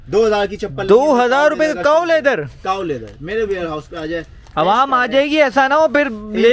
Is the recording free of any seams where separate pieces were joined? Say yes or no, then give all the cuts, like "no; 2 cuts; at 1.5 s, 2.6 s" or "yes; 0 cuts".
no; 1 cut; at 4.4 s